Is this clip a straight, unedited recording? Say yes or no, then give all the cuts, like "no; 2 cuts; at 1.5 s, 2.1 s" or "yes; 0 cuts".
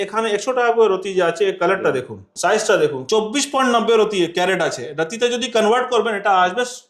no; 2 cuts; at 2.2 s, 3.0 s